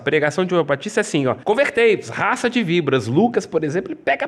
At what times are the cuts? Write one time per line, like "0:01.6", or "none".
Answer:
0:01.4